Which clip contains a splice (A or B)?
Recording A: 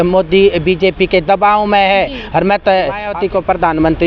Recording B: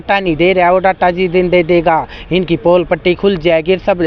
A